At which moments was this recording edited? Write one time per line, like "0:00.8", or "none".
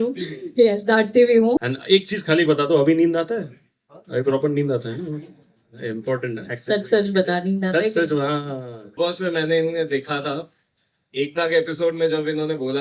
0:01.7
0:08.8